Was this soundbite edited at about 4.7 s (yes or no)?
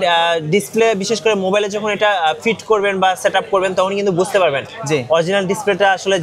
no